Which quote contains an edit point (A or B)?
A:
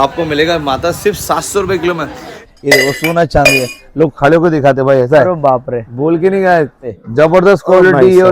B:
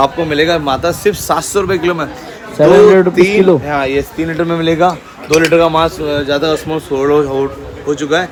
A